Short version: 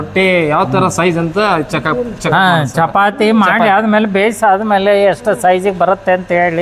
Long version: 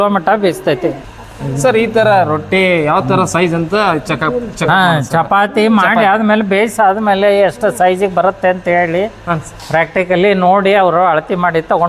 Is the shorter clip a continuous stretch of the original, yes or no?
yes